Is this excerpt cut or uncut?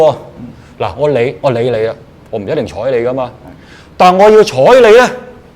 uncut